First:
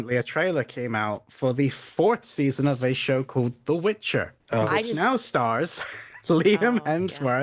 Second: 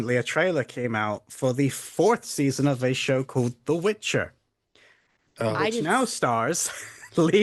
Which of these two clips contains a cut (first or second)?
first